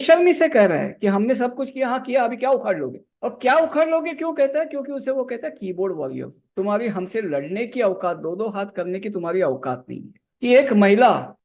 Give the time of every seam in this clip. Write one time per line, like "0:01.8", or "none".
0:10.2